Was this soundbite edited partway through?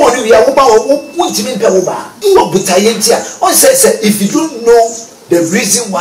yes; 1 cut; at 2.1 s

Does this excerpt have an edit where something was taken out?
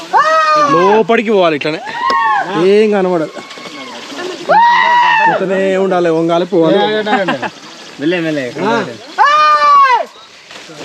no; 0 cuts

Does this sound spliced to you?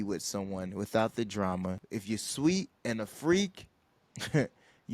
yes; 1 cut; at 1.9 s

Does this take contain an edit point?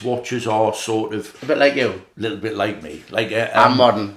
yes; 1 cut; at 2.1 s

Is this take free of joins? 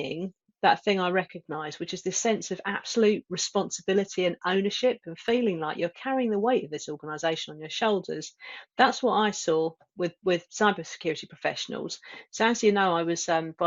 yes; 0 cuts

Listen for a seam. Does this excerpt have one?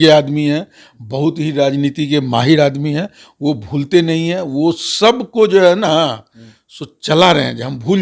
no; 0 cuts

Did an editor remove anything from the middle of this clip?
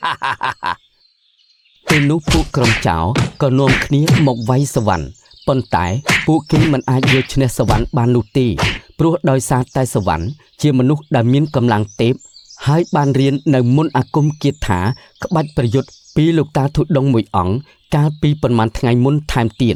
no; 0 cuts

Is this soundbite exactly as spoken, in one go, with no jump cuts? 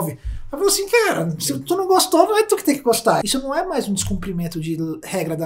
no; 1 cut; at 3.2 s

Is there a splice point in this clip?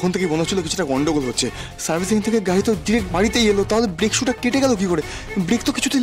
no; 0 cuts

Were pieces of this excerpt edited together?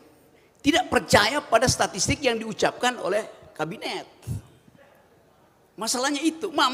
no; 0 cuts

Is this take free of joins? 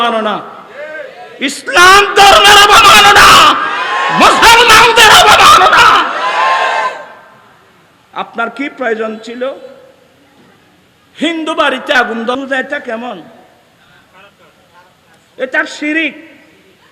no; 1 cut; at 12.4 s

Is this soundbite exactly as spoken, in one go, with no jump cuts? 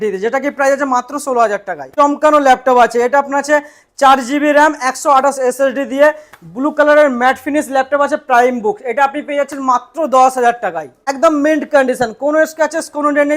no; 2 cuts; at 1.8 s, 11.0 s

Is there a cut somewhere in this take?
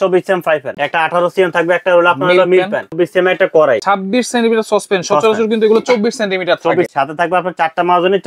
yes; 4 cuts; at 0.8 s, 2.9 s, 3.8 s, 6.9 s

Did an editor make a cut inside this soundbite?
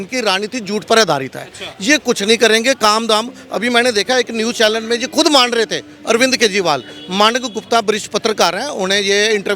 no; 0 cuts

